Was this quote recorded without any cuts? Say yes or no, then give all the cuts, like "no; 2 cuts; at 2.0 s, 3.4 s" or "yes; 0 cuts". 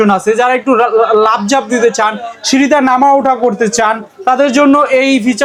yes; 0 cuts